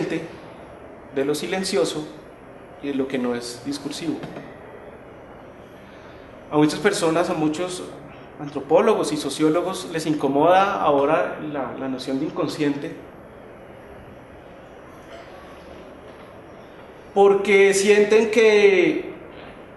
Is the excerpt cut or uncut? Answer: cut